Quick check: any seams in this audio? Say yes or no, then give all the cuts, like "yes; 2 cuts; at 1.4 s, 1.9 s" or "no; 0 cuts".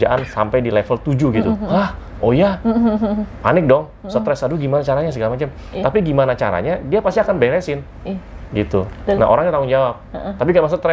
no; 0 cuts